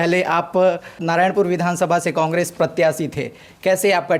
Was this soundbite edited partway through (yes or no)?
yes